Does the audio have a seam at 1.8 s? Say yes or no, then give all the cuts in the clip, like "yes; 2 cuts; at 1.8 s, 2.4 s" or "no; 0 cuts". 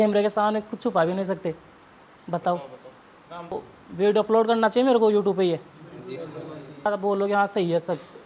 no; 2 cuts; at 3.5 s, 6.9 s